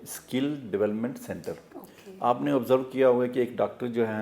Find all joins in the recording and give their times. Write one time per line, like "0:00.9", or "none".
none